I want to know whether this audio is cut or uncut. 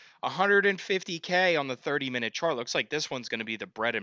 uncut